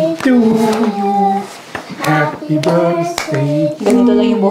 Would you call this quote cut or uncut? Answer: uncut